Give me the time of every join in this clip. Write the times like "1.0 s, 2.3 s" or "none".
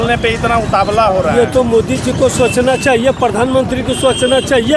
none